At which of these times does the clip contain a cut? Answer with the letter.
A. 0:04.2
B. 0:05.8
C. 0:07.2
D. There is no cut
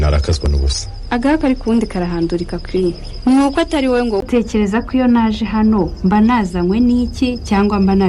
A